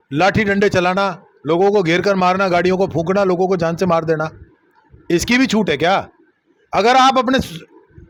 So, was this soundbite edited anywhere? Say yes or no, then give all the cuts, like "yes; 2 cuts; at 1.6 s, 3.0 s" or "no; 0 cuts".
no; 0 cuts